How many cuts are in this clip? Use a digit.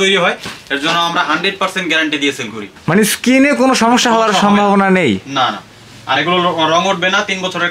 1